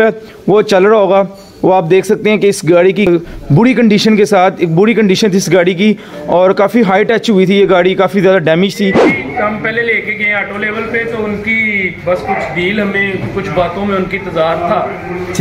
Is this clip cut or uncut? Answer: cut